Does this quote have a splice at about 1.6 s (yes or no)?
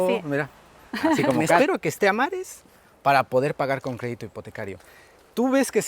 yes